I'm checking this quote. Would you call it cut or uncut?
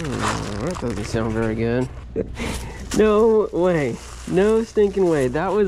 cut